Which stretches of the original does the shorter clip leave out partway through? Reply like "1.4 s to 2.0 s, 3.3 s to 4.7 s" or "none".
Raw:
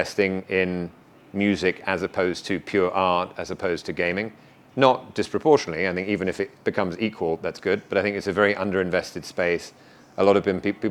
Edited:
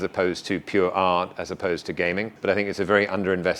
4.4 s to 7.9 s